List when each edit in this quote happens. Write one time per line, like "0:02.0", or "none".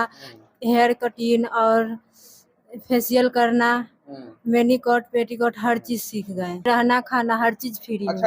0:06.7